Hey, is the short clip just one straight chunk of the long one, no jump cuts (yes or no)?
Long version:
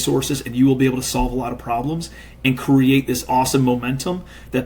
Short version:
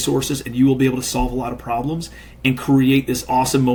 yes